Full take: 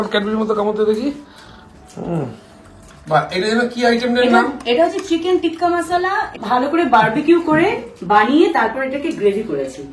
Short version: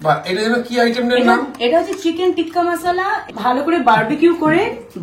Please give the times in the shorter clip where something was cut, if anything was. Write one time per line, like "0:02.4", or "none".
none

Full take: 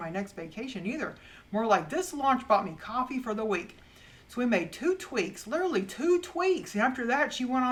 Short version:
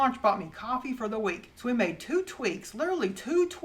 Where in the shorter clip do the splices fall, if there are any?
0:01.5

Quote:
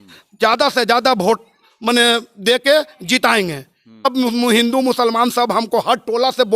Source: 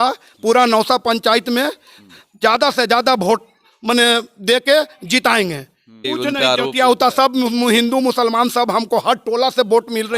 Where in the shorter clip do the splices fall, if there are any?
0:04.1

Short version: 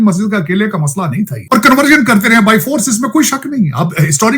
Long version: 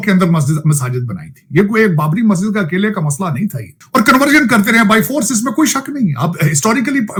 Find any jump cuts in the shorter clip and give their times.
0:01.4

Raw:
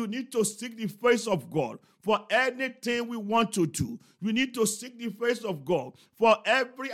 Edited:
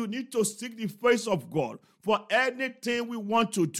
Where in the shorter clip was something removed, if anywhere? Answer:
none

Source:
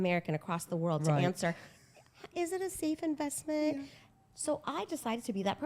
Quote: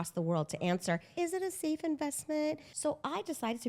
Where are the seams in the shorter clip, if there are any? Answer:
0:01.1
0:02.7

